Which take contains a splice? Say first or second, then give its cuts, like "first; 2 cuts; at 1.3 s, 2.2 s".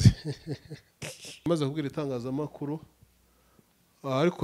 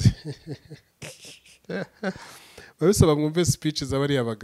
first; 1 cut; at 1.5 s